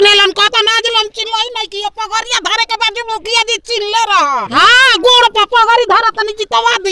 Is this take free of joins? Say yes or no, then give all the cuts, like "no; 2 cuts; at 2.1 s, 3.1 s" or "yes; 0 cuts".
no; 1 cut; at 4.4 s